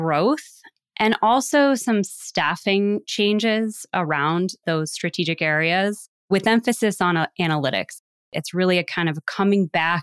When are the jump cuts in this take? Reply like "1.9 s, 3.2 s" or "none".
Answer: 8.3 s